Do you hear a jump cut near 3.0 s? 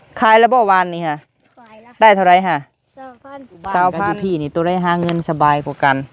no; 1 cut; at 4.2 s

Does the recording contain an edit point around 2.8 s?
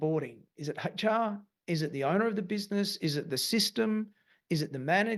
no; 0 cuts

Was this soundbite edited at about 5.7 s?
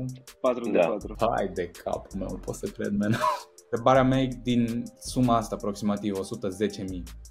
no; 2 cuts; at 1.1 s, 3.8 s

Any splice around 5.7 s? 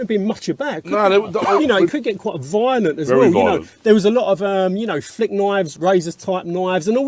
yes; 2 cuts; at 1.5 s, 5.7 s

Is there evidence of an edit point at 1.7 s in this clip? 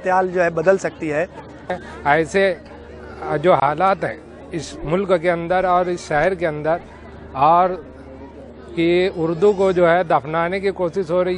yes; 1 cut; at 1.7 s

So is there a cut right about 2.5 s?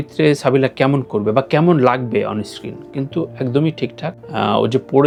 no; 0 cuts

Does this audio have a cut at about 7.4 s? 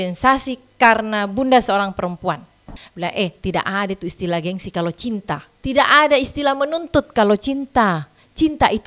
no; 2 cuts; at 2.8 s, 5.5 s

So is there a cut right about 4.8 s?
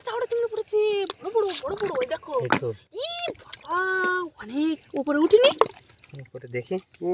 no; 0 cuts

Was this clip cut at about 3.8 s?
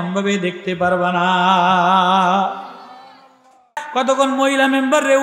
yes; 1 cut; at 3.8 s

